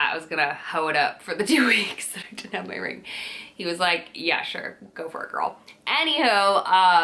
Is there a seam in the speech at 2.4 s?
no; 0 cuts

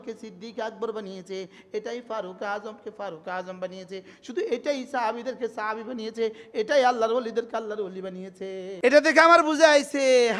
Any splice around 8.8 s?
yes; 1 cut; at 8.8 s

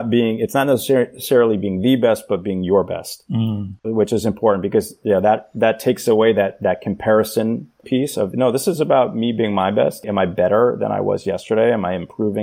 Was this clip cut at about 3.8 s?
yes; 3 cuts; at 3.8 s, 7.8 s, 10.0 s

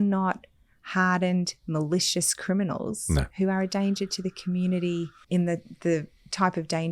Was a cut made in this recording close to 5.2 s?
yes; 1 cut; at 5.2 s

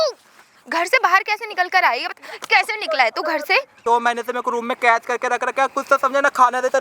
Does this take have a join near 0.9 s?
no; 1 cut; at 3.7 s

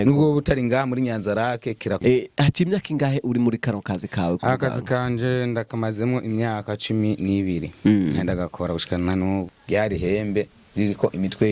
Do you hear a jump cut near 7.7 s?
no; 2 cuts; at 2.0 s, 9.5 s

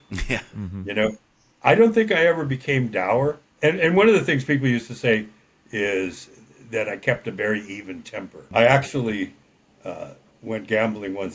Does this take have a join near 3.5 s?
yes; 2 cuts; at 3.5 s, 8.4 s

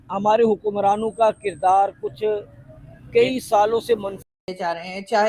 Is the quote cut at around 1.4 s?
no; 1 cut; at 4.3 s

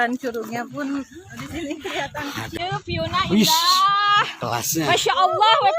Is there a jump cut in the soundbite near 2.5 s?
yes; 1 cut; at 2.5 s

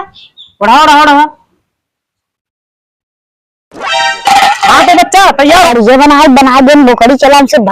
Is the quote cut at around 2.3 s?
no; 1 cut; at 5.7 s

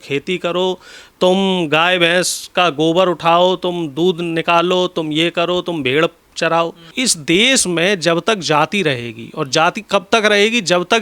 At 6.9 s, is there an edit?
yes; 1 cut; at 6.9 s

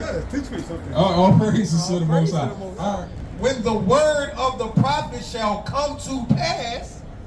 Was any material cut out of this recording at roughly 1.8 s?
no; 1 cut; at 3.1 s

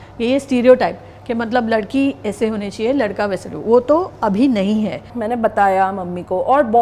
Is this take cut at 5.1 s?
yes; 1 cut; at 5.1 s

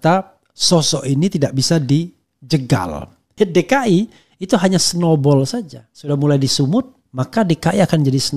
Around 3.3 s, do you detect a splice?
yes; 1 cut; at 3.3 s

